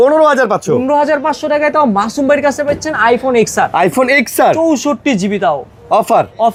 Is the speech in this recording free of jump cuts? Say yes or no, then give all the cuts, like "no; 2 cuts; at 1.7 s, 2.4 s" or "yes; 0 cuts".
yes; 0 cuts